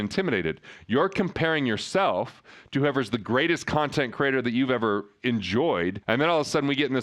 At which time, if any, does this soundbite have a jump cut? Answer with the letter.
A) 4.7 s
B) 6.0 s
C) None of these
B